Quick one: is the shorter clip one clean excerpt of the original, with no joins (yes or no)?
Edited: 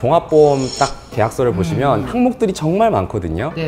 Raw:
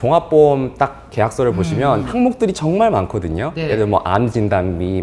yes